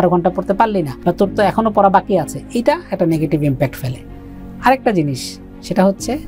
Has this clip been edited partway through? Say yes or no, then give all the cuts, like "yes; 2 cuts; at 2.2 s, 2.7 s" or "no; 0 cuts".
no; 0 cuts